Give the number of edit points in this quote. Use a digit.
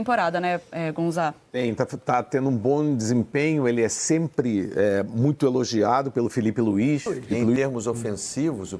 1